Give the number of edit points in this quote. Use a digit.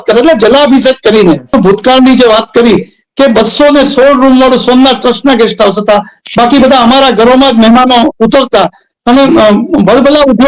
1